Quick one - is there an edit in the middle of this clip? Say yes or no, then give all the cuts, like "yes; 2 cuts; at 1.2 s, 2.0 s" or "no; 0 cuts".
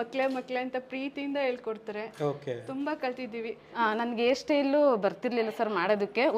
yes; 1 cut; at 3.7 s